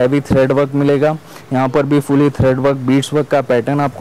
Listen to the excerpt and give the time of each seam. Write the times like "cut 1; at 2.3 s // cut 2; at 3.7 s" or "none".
none

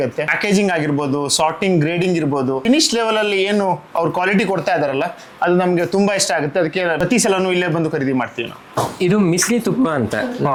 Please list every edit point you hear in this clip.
none

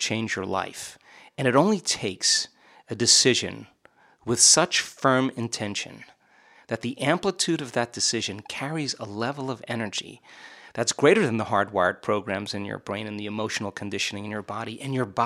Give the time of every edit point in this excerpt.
none

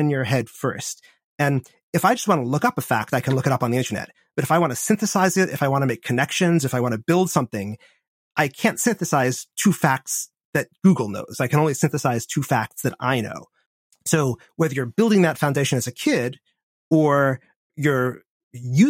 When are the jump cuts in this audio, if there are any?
cut 1; at 17.7 s

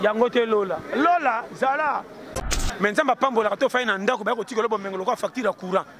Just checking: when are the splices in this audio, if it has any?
cut 1; at 2.4 s

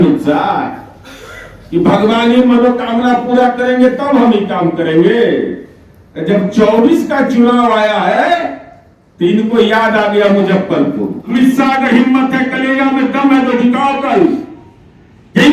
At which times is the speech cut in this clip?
cut 1; at 11.3 s

